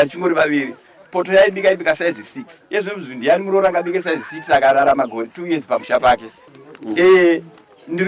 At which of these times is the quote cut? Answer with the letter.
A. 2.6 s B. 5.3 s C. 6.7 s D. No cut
D